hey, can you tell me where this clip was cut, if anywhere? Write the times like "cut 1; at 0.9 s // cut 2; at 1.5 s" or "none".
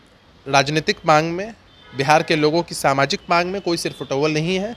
none